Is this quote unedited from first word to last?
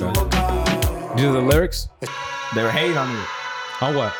no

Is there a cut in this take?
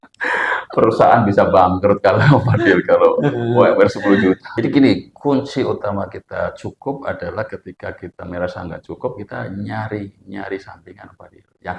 yes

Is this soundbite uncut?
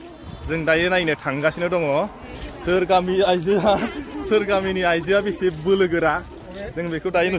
yes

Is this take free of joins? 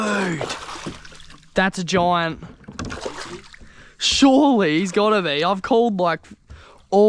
yes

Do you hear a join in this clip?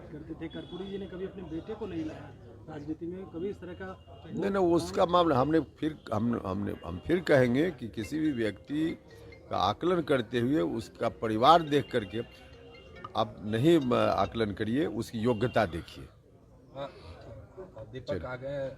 no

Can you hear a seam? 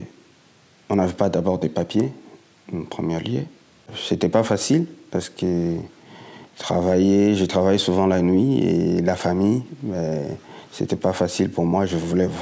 yes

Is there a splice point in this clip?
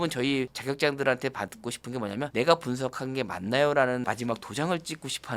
yes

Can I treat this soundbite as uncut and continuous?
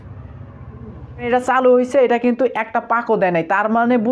no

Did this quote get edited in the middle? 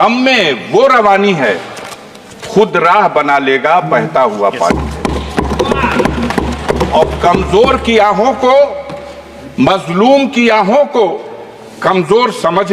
no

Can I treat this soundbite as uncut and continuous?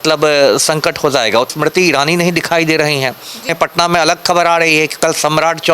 no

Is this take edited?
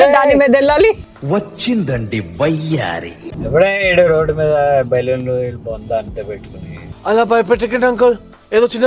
yes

